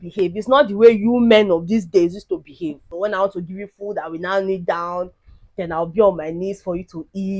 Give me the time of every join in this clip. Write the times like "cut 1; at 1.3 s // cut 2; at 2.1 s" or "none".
cut 1; at 2.9 s

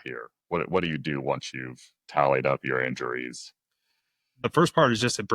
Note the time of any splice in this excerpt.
cut 1; at 4.4 s

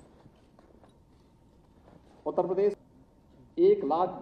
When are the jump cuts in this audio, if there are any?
cut 1; at 2.8 s

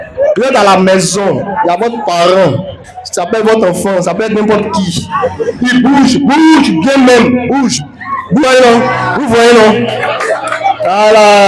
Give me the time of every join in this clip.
cut 1; at 8.4 s

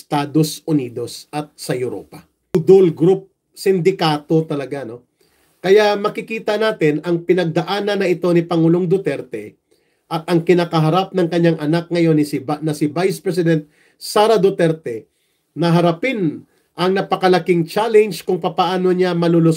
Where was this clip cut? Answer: cut 1; at 2.5 s

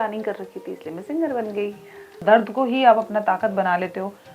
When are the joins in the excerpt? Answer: cut 1; at 2.2 s

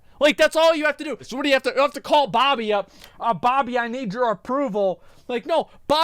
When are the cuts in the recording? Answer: cut 1; at 1.2 s // cut 2; at 5.1 s

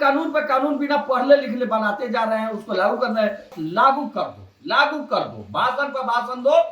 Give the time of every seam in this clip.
cut 1; at 3.6 s

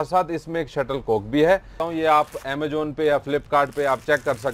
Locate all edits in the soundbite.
cut 1; at 1.8 s

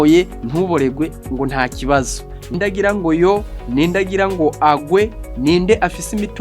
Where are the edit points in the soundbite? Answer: cut 1; at 2.6 s

